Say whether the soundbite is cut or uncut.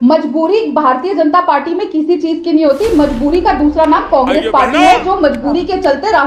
uncut